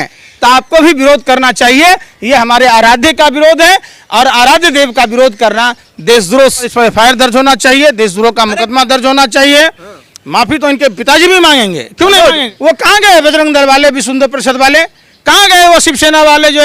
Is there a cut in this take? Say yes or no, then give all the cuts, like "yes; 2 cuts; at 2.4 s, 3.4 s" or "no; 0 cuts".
yes; 2 cuts; at 6.7 s, 12.5 s